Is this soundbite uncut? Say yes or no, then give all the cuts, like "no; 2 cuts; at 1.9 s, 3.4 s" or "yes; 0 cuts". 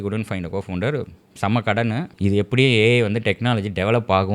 no; 1 cut; at 2.1 s